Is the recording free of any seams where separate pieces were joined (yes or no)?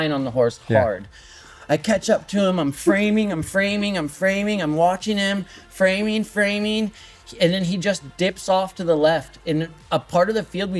yes